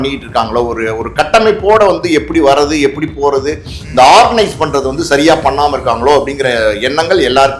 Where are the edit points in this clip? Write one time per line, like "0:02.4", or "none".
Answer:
none